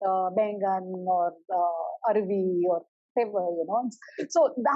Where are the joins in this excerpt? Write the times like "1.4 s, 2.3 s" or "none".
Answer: none